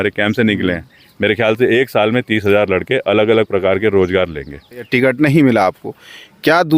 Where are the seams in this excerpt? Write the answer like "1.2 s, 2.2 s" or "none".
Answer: 4.9 s